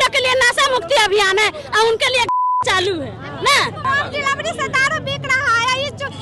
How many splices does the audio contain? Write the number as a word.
one